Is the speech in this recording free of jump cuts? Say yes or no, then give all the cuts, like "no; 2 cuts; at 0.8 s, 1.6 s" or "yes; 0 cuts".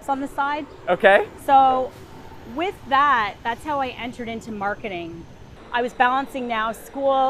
no; 1 cut; at 5.5 s